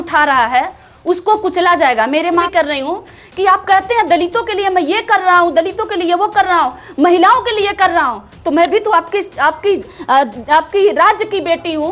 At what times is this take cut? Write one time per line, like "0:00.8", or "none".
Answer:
0:02.4